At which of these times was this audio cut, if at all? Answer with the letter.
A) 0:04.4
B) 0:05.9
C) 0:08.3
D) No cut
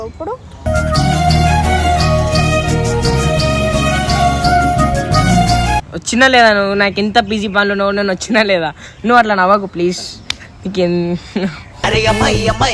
D